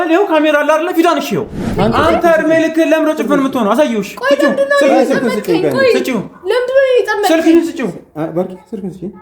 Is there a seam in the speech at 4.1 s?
no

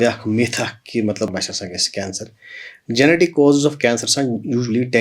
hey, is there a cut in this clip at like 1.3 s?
yes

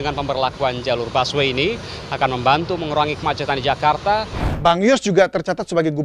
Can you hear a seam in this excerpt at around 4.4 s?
yes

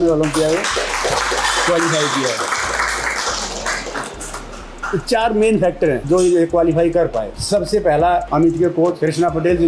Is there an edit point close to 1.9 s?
no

